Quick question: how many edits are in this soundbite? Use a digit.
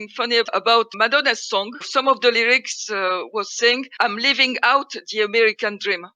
2